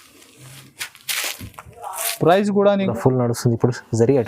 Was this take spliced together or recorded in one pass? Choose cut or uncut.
cut